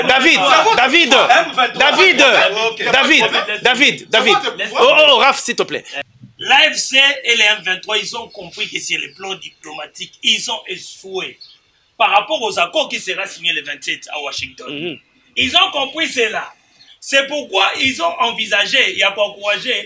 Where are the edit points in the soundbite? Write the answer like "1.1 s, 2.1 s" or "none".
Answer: 5.9 s